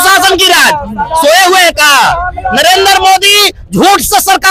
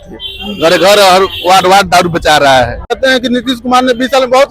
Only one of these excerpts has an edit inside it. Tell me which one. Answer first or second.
second